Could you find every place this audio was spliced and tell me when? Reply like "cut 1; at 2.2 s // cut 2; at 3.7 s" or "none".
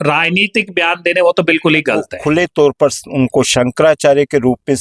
cut 1; at 2.1 s